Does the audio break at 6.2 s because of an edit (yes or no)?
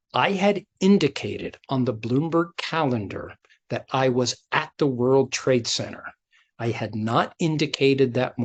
no